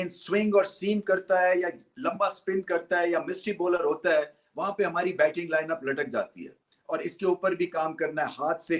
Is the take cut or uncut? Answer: uncut